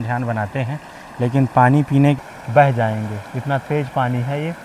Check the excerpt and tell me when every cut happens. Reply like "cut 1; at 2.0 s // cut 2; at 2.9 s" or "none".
cut 1; at 2.2 s